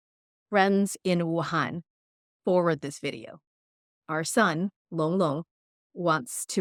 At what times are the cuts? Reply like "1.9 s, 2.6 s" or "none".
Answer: none